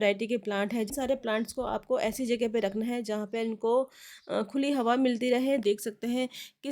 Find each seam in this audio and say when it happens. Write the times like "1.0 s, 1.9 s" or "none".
0.9 s, 5.6 s